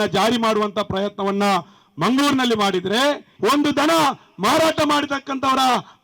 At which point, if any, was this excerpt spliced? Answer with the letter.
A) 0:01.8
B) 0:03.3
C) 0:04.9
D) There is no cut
B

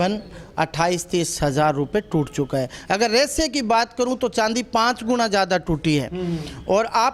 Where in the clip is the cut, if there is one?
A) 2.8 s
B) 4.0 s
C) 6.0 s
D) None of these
D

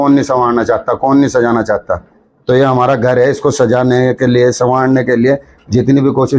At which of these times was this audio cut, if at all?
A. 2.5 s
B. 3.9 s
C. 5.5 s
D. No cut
D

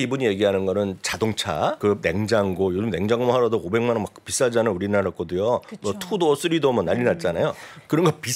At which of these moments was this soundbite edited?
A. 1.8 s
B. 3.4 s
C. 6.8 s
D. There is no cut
A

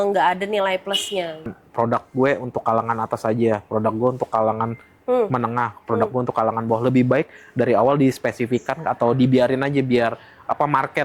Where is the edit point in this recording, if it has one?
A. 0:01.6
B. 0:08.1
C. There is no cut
A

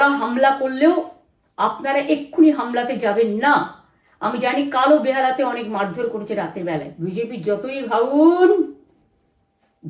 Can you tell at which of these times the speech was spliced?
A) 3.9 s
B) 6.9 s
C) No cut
B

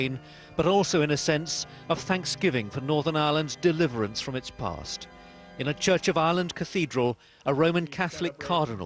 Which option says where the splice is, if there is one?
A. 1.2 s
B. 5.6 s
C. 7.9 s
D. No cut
D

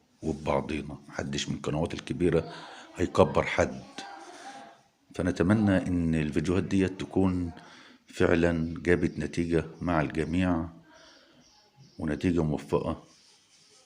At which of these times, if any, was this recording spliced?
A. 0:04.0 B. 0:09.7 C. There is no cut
C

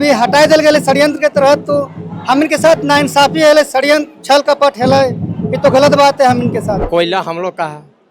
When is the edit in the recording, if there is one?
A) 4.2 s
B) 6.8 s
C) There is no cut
B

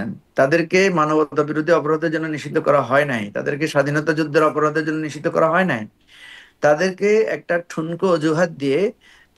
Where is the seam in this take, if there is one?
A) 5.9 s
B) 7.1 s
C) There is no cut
C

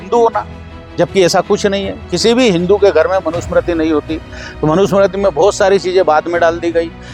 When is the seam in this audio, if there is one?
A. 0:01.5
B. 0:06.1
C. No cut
C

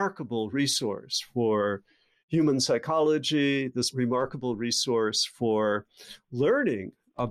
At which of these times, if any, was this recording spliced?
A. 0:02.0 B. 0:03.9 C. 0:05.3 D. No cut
B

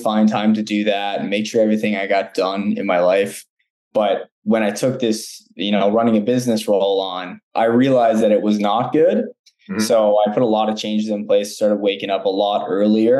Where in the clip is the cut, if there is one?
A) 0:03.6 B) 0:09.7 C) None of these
C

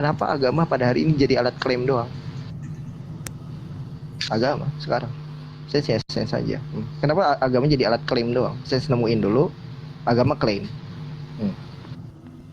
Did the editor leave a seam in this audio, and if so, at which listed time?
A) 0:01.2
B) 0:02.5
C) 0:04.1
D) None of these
C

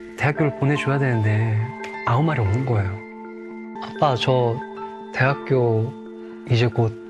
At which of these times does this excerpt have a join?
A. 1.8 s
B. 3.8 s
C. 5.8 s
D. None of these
B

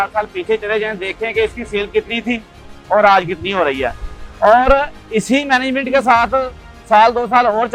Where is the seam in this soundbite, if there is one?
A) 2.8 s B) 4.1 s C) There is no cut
C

